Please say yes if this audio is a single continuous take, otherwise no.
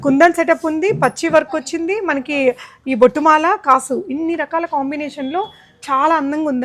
yes